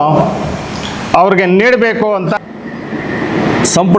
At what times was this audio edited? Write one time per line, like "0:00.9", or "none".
0:02.3